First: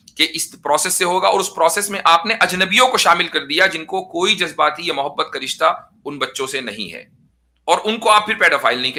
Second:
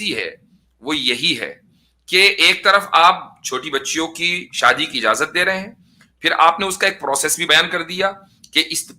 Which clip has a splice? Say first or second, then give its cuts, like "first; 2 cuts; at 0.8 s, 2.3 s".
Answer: second; 1 cut; at 7.4 s